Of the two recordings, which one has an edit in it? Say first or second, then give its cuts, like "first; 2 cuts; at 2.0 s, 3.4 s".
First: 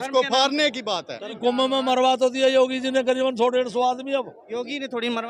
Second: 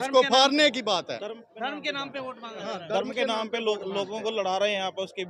first; 1 cut; at 1.3 s